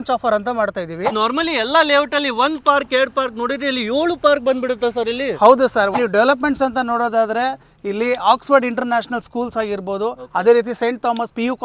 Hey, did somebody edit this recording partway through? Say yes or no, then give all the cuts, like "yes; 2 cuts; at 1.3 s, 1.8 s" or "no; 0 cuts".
yes; 2 cuts; at 1.1 s, 5.9 s